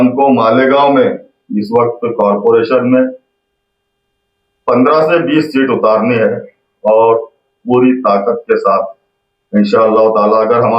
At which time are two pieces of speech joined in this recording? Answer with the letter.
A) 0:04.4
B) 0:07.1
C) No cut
C